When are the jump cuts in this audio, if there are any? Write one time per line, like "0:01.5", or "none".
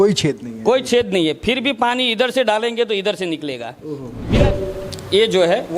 0:04.4